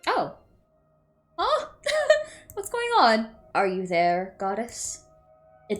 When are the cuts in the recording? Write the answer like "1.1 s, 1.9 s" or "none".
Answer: 3.4 s